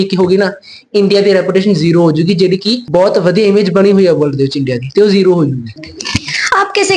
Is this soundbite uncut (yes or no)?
yes